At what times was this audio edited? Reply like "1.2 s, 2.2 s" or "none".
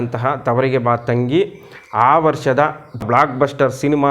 3.0 s